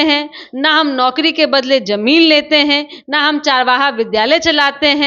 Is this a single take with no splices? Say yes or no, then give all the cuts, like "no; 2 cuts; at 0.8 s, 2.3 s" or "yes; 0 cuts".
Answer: yes; 0 cuts